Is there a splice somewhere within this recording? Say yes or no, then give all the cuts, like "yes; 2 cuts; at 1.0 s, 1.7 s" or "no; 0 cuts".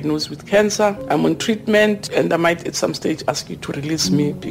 yes; 2 cuts; at 1.0 s, 2.0 s